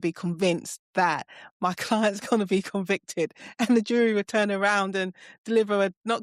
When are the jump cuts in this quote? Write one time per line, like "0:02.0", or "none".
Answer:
none